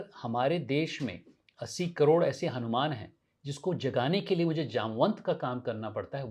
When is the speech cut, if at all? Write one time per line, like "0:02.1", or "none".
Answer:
none